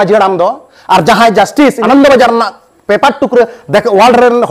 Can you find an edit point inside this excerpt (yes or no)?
yes